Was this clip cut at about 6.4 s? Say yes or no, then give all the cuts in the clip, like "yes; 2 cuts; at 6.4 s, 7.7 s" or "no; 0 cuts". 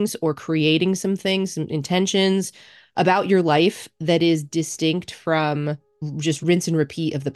yes; 1 cut; at 6.4 s